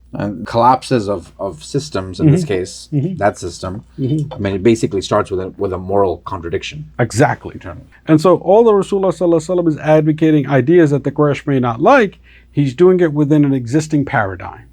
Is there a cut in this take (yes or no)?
yes